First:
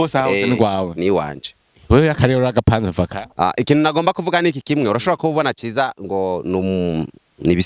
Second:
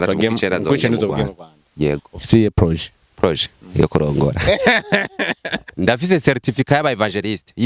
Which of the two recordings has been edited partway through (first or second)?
second